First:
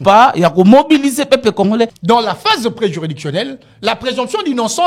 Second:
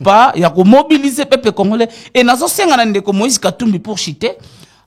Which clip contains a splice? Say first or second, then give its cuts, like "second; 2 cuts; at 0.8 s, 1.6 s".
first; 1 cut; at 2.0 s